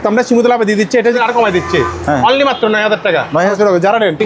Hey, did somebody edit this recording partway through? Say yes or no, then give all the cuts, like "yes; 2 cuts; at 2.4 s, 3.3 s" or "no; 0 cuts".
yes; 2 cuts; at 1.2 s, 3.5 s